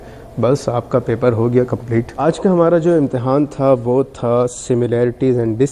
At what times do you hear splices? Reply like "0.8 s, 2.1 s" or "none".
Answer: 2.1 s